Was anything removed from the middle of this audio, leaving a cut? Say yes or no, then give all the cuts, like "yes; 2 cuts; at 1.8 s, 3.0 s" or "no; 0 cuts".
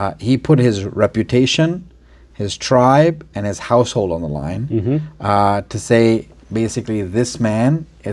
no; 0 cuts